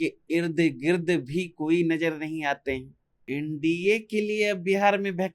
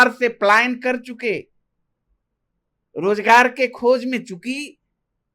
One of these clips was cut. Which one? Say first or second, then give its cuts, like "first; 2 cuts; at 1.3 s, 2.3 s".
first; 1 cut; at 3.1 s